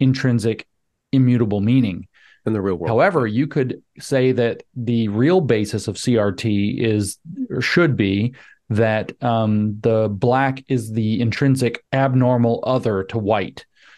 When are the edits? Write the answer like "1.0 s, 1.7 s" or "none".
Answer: 11.8 s